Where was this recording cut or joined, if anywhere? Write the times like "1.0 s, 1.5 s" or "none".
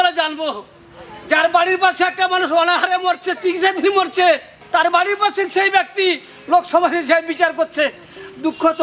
4.5 s